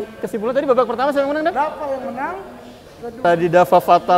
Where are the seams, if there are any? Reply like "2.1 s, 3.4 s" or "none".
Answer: 3.2 s